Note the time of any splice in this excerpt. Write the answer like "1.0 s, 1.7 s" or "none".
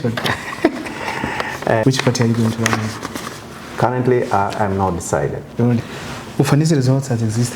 1.8 s, 5.8 s